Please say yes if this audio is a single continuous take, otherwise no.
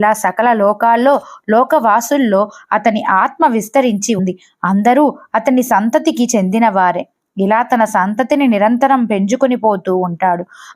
no